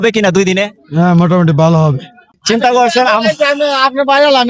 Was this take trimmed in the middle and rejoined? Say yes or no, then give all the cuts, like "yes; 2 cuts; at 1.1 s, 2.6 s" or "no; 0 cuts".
yes; 1 cut; at 2.3 s